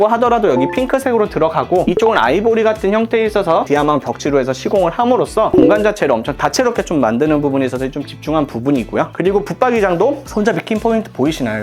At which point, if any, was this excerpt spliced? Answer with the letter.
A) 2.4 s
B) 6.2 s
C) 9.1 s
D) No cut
C